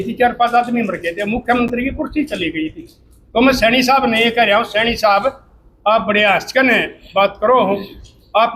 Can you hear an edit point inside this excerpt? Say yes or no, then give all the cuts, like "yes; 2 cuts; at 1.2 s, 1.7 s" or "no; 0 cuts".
no; 0 cuts